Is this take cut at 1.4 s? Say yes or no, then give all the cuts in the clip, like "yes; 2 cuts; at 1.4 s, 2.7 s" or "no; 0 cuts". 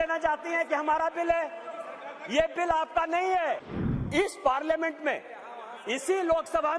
no; 1 cut; at 3.7 s